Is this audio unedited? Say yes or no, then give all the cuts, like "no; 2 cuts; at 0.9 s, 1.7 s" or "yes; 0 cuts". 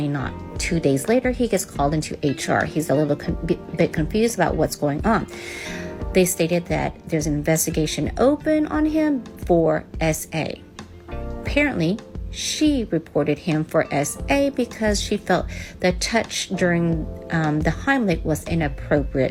yes; 0 cuts